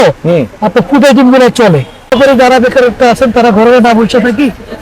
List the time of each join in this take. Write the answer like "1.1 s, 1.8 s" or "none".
2.1 s